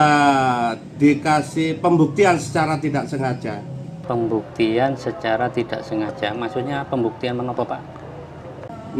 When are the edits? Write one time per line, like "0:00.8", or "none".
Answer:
none